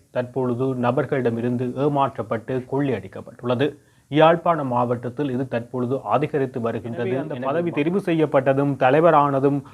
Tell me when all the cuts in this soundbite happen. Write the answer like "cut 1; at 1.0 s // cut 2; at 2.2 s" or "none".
cut 1; at 7.1 s